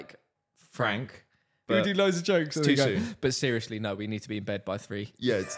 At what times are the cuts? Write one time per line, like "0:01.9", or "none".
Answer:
0:01.5